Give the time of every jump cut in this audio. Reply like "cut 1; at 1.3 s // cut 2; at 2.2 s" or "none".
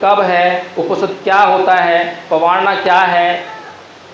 none